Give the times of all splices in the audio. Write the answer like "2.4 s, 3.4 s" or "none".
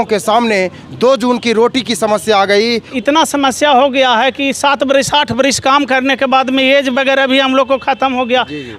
2.9 s